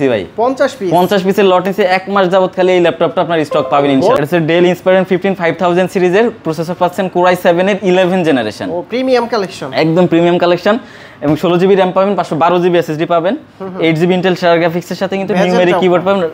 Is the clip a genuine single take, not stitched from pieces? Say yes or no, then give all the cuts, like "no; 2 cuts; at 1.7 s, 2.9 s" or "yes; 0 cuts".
no; 1 cut; at 4.2 s